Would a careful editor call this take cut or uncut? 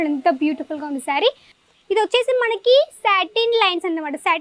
cut